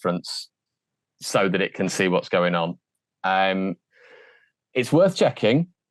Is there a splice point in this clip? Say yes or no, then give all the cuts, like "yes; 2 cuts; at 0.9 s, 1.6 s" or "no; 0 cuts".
no; 0 cuts